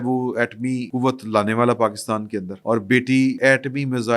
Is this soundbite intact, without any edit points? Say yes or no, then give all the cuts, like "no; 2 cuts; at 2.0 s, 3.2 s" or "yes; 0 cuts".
no; 3 cuts; at 0.9 s, 2.5 s, 3.4 s